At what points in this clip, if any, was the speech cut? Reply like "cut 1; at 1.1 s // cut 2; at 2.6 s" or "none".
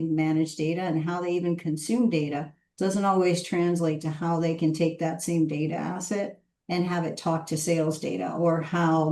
none